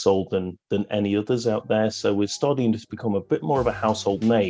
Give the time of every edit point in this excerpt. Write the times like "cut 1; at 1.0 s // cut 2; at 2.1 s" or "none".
none